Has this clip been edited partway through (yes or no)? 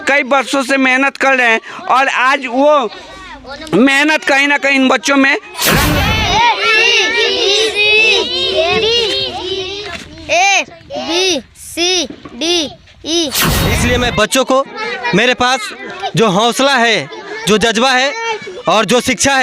yes